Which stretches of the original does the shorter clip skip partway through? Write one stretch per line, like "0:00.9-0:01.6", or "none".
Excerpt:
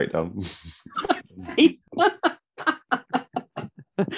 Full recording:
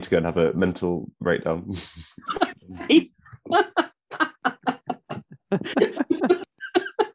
0:03.2-0:03.4